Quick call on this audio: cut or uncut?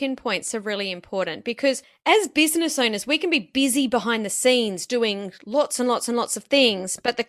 uncut